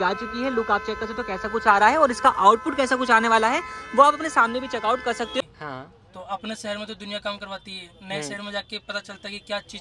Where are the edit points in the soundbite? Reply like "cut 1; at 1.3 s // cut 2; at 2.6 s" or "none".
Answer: cut 1; at 5.4 s